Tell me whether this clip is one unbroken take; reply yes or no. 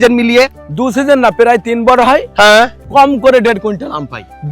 no